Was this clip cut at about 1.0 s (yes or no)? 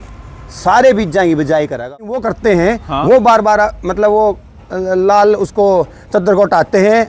no